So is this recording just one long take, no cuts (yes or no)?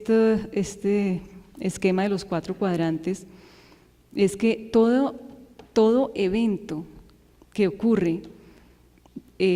yes